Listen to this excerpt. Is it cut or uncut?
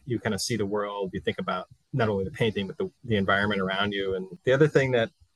cut